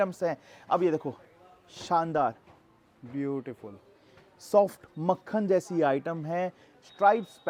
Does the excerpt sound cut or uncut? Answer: uncut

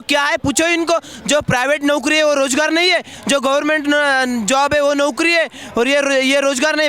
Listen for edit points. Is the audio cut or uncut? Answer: uncut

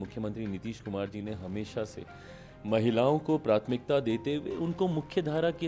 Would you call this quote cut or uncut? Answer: uncut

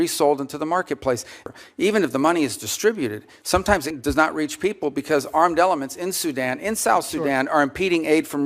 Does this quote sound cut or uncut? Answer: cut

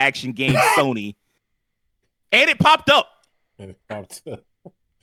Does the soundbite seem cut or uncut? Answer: uncut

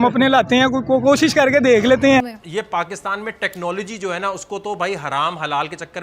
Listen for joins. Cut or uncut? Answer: cut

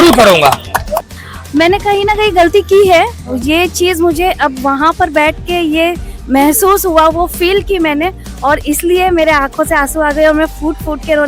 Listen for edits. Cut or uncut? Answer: cut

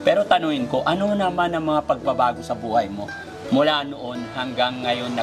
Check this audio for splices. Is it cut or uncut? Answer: uncut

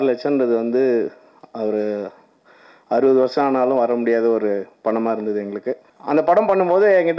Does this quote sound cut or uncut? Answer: cut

